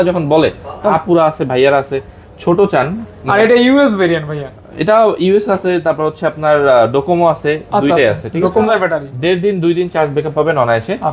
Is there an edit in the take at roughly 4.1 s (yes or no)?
no